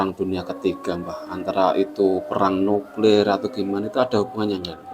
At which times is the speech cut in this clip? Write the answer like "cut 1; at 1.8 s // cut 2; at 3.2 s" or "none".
none